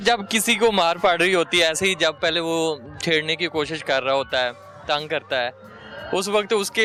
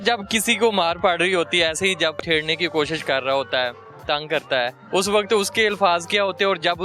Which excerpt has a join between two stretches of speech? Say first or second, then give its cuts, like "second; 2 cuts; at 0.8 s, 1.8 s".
second; 2 cuts; at 2.2 s, 4.8 s